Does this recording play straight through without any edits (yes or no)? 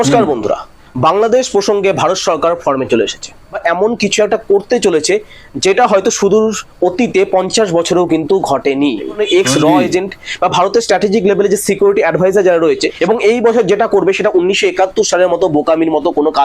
no